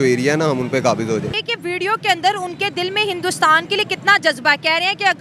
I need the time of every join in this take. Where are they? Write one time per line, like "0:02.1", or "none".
0:01.3